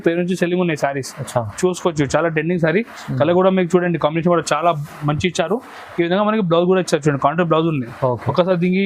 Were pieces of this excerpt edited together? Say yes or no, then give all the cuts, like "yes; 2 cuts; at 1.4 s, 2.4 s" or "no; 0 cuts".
no; 0 cuts